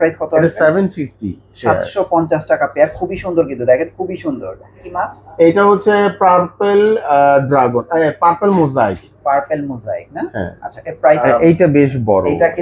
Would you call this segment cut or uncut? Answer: cut